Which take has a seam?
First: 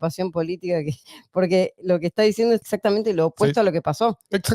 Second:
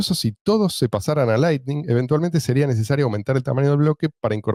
first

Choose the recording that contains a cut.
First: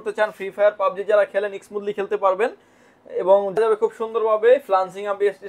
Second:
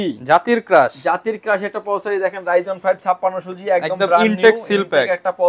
first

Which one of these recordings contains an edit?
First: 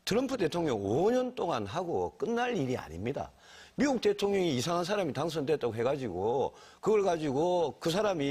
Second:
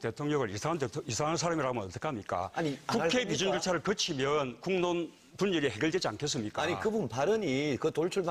first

